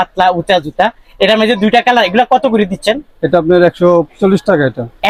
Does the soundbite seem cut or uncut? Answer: uncut